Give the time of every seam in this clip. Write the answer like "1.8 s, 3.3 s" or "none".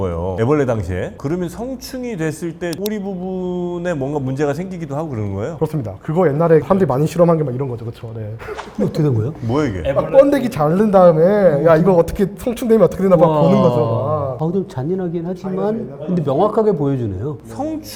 none